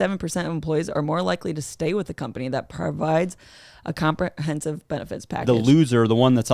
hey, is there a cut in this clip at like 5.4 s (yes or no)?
yes